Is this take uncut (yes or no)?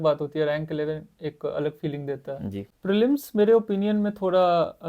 no